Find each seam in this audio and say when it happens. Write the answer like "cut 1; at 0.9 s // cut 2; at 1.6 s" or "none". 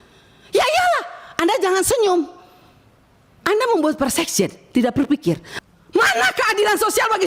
cut 1; at 5.5 s

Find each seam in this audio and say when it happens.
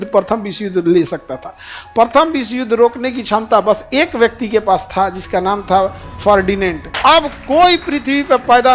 cut 1; at 6.9 s

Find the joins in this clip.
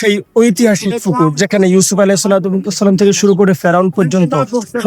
none

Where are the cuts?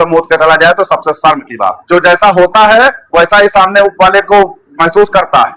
cut 1; at 1.8 s

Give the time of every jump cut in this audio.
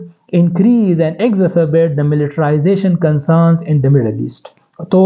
none

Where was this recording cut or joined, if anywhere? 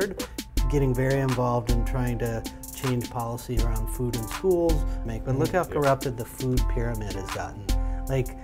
cut 1; at 5.0 s

